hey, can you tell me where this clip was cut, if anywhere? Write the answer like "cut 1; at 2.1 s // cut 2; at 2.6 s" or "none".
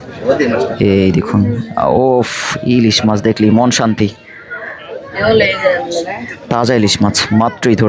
none